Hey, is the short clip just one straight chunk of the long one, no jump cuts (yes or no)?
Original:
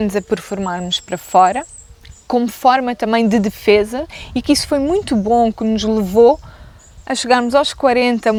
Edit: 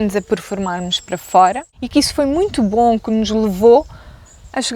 no